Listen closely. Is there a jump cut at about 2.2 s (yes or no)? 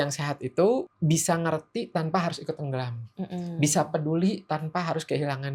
no